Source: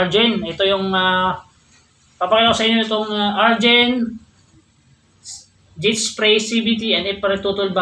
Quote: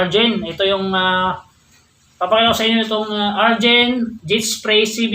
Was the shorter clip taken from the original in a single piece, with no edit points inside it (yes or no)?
no